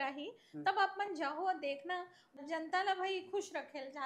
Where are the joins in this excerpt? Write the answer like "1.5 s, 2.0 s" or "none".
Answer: 2.2 s